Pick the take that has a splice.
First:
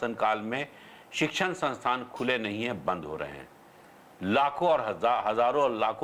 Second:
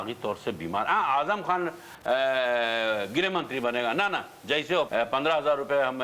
second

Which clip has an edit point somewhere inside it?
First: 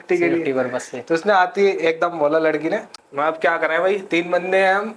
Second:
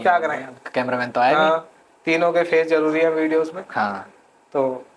first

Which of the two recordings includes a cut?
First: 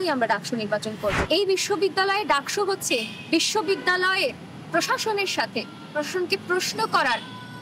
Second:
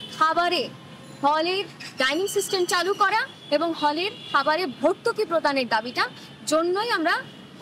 first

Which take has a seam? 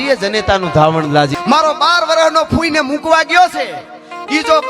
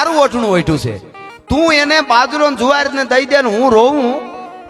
first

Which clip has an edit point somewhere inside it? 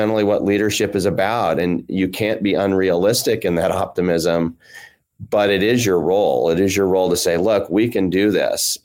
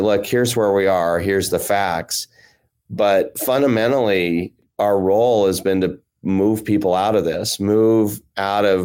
second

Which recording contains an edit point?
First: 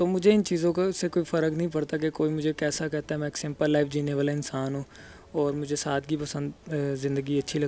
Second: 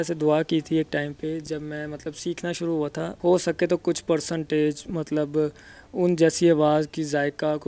second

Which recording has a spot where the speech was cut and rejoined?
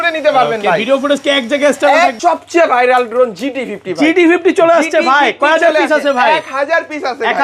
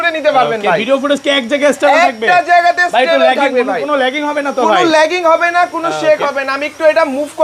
first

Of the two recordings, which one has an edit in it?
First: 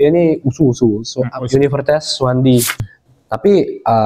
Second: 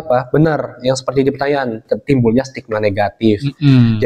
first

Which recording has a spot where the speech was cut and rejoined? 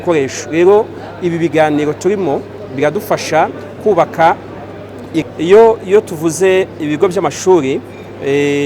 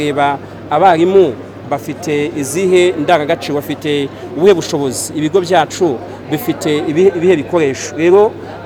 first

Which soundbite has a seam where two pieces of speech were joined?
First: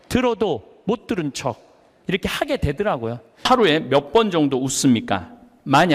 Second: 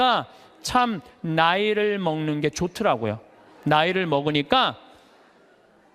first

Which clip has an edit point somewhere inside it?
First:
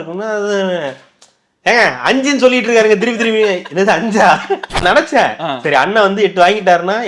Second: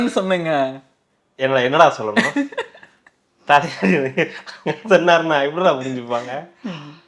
first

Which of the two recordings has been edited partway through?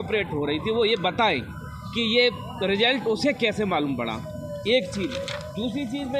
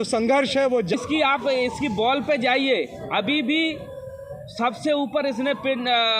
second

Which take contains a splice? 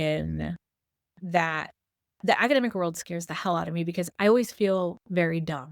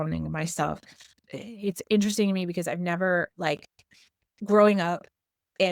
second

